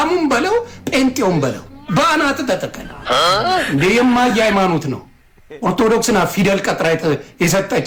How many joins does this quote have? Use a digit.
0